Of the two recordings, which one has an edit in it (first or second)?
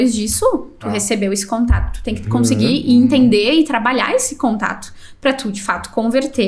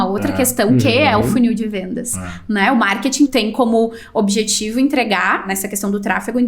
second